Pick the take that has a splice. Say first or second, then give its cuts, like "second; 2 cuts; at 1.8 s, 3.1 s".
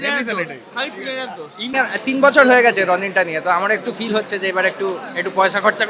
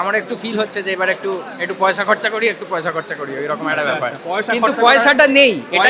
first; 1 cut; at 1.7 s